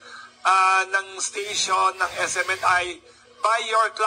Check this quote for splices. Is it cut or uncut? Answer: uncut